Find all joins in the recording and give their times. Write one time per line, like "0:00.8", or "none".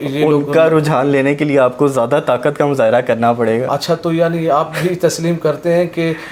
none

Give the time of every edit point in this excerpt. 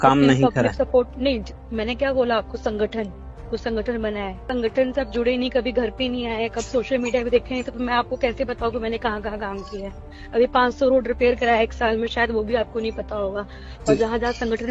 0:04.4

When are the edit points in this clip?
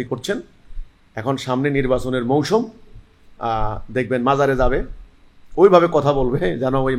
none

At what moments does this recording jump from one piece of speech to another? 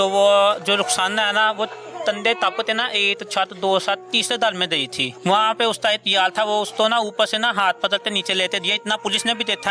0:05.0

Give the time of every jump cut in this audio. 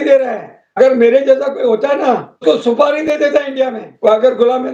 0:00.8
0:02.4
0:03.8

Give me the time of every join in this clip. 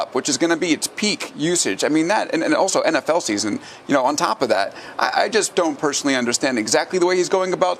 none

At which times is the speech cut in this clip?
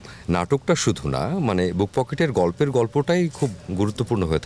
none

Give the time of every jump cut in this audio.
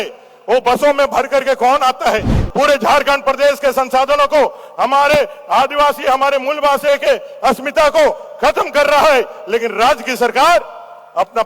0:02.4

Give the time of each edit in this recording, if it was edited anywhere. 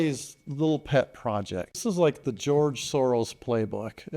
0:01.8

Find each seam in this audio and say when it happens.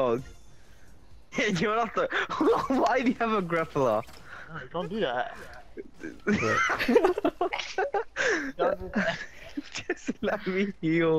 0:01.3

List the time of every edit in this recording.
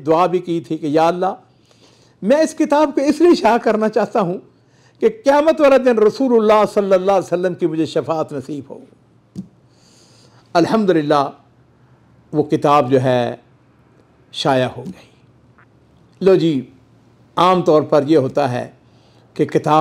none

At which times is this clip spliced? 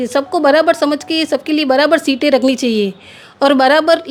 none

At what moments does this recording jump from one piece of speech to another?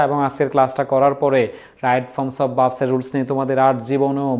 none

